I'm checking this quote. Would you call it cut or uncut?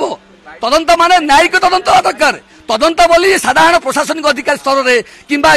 uncut